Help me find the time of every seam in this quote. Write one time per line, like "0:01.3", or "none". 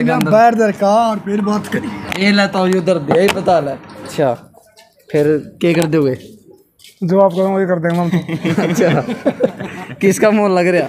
0:04.1